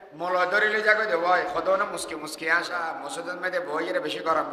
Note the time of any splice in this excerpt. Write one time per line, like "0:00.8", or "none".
0:03.0